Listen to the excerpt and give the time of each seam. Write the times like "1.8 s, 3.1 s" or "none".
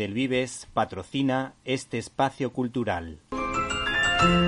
3.2 s